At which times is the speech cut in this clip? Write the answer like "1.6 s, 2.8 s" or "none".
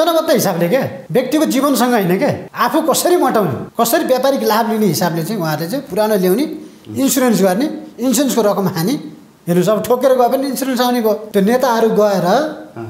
1.0 s, 2.5 s, 3.6 s, 11.2 s

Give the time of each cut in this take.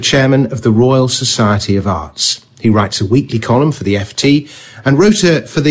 3.4 s

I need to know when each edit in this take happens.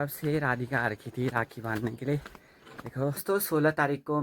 3.2 s

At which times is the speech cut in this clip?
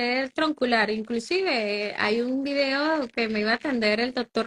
none

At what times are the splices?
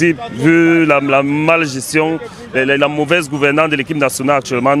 none

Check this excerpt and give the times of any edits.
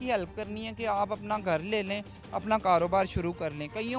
none

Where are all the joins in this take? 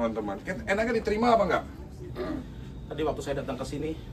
2.0 s

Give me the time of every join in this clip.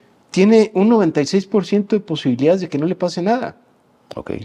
none

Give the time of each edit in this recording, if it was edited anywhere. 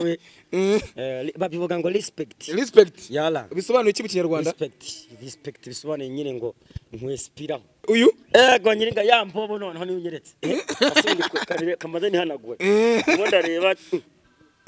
7.8 s

